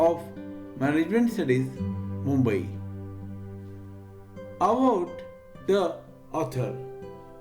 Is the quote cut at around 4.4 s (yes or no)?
yes